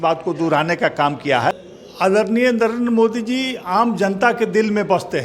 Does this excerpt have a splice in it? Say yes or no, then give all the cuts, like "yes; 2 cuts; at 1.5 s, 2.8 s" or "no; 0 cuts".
yes; 1 cut; at 1.5 s